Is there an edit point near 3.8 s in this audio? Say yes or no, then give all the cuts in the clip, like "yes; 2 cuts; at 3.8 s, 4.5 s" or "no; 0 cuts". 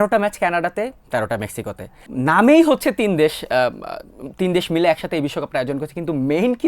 no; 1 cut; at 2.0 s